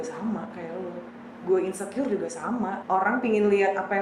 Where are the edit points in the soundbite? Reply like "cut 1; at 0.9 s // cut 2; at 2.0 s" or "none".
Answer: cut 1; at 2.8 s